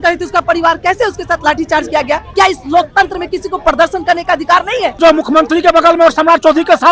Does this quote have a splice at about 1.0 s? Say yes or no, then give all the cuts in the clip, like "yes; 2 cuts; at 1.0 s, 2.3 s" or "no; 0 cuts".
no; 2 cuts; at 2.3 s, 5.0 s